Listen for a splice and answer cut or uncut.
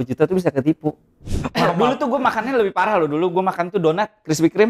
cut